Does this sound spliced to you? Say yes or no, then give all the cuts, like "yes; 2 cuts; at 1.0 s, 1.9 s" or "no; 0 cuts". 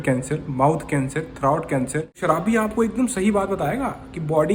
yes; 1 cut; at 2.1 s